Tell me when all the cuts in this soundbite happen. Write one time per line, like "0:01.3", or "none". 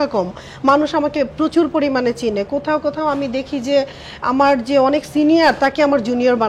none